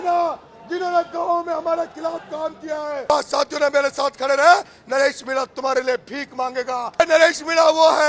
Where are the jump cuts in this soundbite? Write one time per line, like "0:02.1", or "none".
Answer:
0:03.1
0:07.0